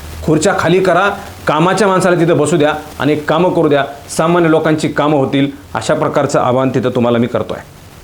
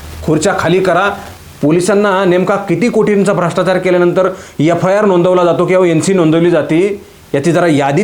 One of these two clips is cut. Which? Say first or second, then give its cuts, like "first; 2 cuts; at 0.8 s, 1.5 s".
second; 1 cut; at 1.3 s